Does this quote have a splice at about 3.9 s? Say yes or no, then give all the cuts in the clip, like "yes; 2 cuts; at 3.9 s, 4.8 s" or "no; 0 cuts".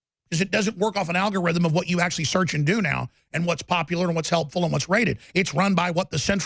no; 0 cuts